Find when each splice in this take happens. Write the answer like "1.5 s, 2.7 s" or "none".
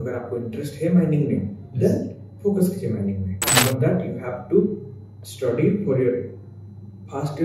3.4 s